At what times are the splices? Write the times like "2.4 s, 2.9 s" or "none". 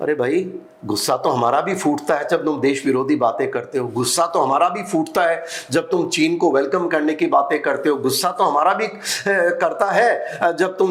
none